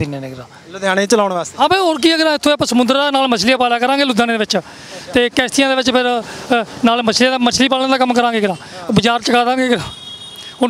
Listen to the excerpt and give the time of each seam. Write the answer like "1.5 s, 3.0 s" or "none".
none